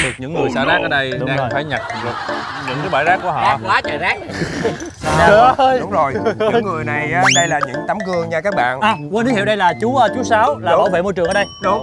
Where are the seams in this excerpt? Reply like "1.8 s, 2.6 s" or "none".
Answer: none